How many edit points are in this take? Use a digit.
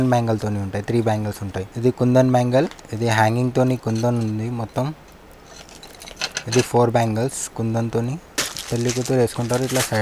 3